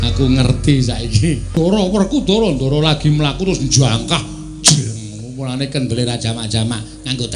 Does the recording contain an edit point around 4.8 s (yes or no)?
no